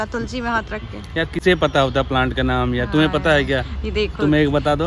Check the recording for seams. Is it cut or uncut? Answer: uncut